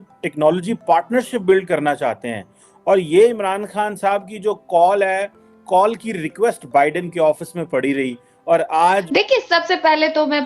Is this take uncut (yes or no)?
no